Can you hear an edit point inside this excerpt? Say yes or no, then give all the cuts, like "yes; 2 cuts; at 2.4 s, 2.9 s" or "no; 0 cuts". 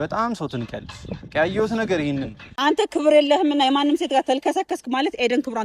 yes; 1 cut; at 2.5 s